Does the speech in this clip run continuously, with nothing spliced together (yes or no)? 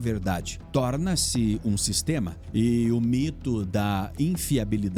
yes